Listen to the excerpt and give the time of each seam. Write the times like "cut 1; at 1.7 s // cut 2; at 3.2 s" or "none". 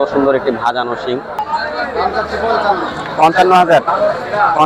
cut 1; at 1.4 s